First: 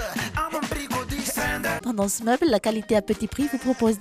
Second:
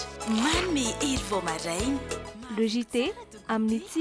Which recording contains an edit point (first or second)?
first